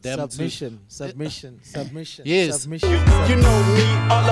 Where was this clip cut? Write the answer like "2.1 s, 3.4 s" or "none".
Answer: 2.7 s